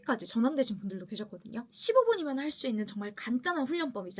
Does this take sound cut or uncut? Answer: uncut